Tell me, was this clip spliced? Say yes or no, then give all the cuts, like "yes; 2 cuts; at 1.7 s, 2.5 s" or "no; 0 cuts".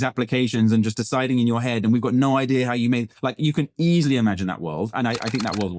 no; 0 cuts